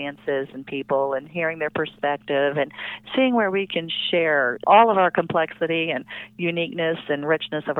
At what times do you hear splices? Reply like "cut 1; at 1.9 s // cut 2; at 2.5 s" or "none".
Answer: none